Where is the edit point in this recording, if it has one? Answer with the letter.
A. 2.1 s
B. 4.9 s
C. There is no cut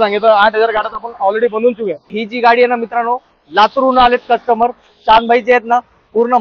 A